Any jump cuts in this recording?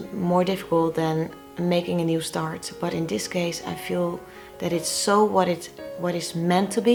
no; 0 cuts

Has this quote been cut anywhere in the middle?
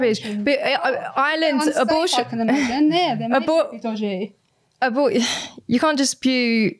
no; 0 cuts

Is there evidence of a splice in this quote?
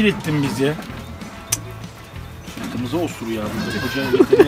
no; 0 cuts

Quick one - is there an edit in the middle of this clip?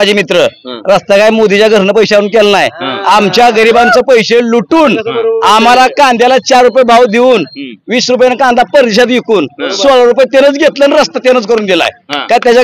no; 0 cuts

